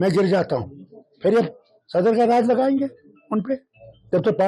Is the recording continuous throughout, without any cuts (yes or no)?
yes